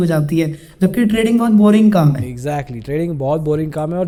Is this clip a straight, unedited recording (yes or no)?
yes